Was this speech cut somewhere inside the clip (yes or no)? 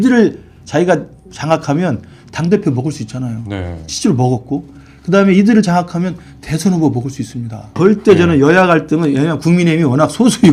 yes